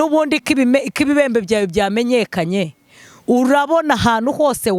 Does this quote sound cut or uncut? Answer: uncut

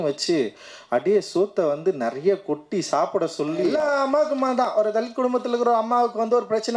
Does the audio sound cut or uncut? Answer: cut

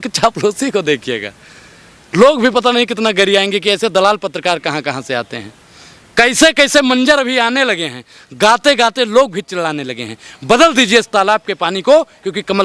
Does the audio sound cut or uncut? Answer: uncut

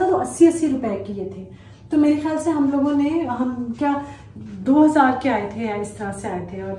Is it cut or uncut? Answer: uncut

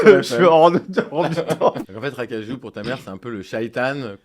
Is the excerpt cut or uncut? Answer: cut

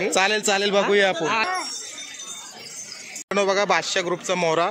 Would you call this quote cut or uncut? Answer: cut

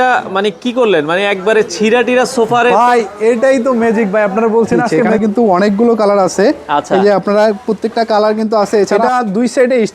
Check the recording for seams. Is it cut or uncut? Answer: cut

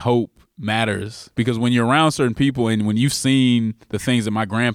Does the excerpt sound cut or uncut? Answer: cut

